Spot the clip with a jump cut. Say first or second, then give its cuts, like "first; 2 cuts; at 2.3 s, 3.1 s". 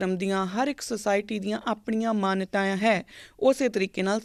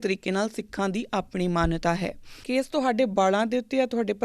second; 1 cut; at 2.4 s